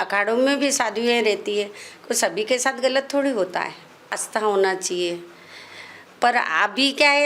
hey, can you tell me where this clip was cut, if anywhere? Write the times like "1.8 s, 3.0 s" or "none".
4.2 s